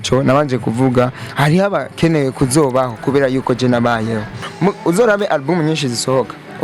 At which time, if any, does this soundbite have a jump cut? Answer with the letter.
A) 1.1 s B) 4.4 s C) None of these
B